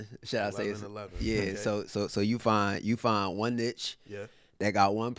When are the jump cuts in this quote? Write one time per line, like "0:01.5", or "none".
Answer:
none